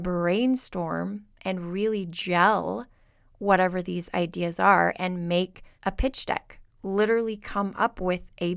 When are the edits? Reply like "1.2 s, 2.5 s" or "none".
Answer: 5.6 s